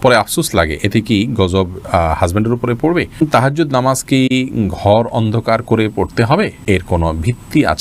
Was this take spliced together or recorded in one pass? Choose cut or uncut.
cut